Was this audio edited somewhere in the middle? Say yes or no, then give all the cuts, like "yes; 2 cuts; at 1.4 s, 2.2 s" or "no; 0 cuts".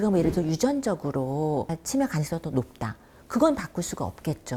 no; 0 cuts